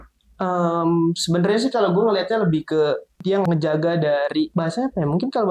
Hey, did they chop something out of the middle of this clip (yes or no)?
yes